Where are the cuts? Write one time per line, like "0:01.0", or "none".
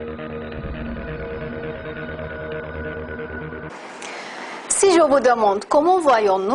none